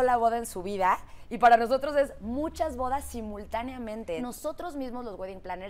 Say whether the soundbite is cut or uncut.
cut